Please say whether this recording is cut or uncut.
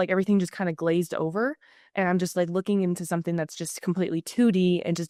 uncut